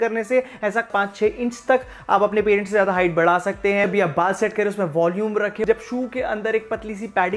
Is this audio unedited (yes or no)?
no